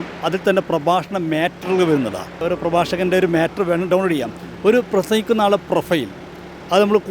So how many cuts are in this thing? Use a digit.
1